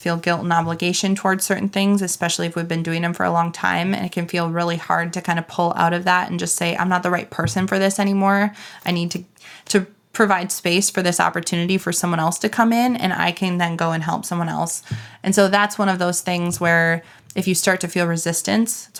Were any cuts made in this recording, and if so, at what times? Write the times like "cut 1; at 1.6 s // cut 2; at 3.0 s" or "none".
none